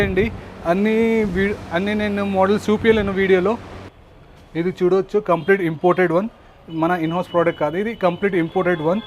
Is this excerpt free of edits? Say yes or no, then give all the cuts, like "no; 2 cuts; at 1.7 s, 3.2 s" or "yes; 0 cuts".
no; 1 cut; at 3.8 s